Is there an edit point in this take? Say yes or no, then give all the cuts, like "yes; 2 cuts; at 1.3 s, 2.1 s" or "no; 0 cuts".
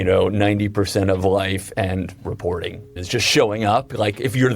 yes; 1 cut; at 2.9 s